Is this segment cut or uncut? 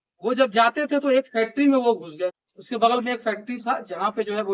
cut